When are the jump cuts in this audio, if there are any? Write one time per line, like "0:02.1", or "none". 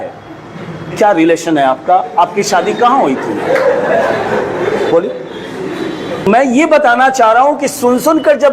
0:06.2